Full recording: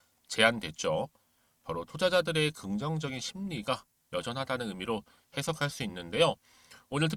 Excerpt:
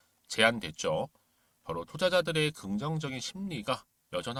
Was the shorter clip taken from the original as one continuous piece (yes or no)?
yes